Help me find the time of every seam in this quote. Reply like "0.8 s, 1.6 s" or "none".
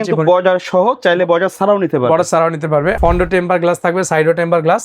3.0 s